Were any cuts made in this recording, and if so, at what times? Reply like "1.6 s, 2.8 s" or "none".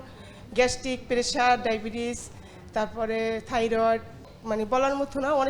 4.3 s